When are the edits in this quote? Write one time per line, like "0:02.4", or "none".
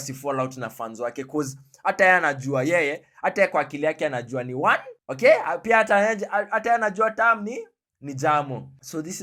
none